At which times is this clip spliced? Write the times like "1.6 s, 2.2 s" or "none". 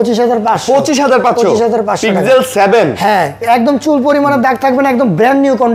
none